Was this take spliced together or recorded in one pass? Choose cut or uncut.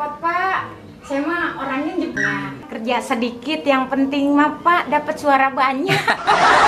cut